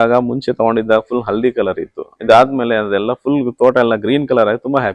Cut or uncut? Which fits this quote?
uncut